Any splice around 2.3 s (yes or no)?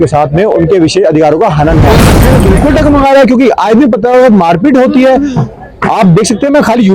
yes